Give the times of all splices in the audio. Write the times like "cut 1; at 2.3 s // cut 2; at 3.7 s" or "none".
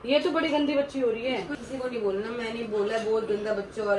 cut 1; at 1.5 s